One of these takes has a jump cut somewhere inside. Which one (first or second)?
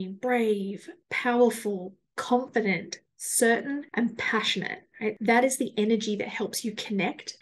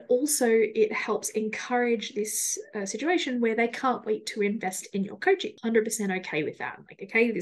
second